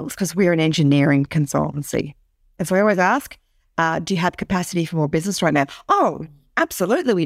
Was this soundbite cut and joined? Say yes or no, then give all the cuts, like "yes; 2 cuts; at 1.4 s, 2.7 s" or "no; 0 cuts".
yes; 1 cut; at 2.6 s